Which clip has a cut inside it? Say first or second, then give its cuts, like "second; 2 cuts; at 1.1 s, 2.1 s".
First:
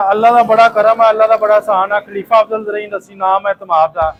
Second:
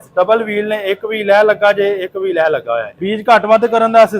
second; 1 cut; at 2.9 s